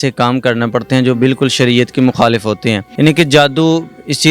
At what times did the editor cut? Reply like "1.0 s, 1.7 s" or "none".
2.9 s